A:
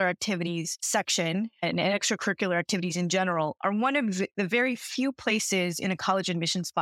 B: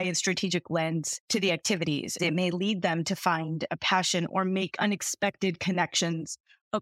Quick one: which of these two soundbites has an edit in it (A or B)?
B